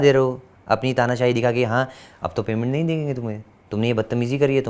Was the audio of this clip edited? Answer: no; 0 cuts

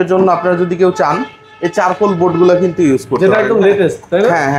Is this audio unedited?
yes; 0 cuts

